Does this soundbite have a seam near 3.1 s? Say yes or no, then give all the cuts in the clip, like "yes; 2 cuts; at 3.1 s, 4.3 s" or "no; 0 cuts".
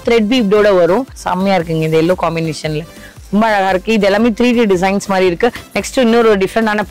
no; 2 cuts; at 1.1 s, 5.6 s